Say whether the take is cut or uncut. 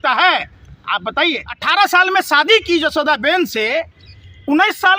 cut